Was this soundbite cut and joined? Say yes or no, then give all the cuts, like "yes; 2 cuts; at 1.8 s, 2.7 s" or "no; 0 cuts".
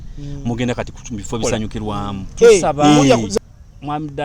yes; 1 cut; at 3.3 s